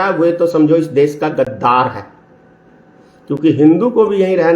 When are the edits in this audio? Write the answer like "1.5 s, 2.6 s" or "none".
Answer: none